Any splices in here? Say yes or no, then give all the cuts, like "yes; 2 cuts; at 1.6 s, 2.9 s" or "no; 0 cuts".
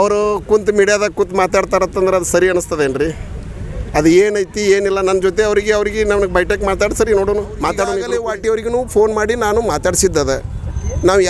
yes; 1 cut; at 8.0 s